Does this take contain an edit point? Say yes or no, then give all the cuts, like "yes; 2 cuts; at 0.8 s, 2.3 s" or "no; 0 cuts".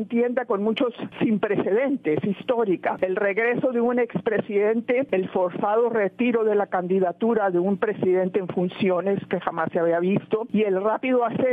yes; 4 cuts; at 1.0 s, 3.0 s, 5.1 s, 10.5 s